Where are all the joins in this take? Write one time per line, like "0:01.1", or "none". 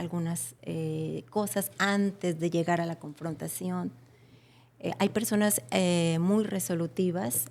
none

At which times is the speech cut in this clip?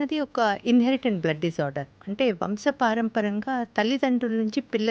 none

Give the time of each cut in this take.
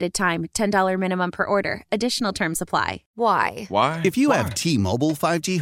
0:03.0

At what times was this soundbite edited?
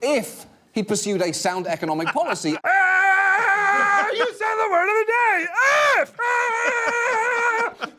0:02.6

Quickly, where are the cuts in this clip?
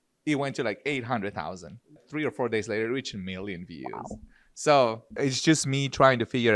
0:02.0
0:05.1

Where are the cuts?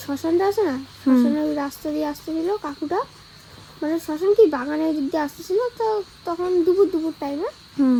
none

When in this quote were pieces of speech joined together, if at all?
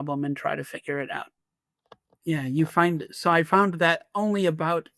0:01.4

